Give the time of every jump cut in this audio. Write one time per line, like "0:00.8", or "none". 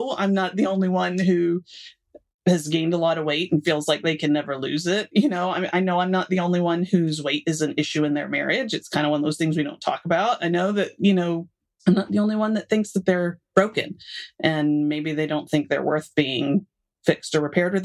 none